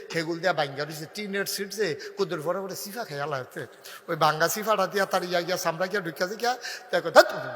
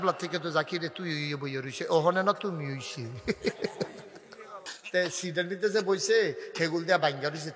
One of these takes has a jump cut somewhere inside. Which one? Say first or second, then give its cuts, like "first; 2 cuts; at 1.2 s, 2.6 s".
second; 1 cut; at 4.7 s